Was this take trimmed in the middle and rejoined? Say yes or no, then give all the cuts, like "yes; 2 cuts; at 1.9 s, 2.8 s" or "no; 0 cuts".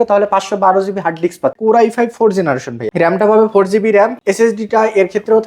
yes; 3 cuts; at 1.6 s, 2.8 s, 4.2 s